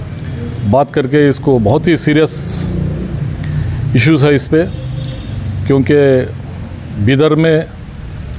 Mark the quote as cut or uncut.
uncut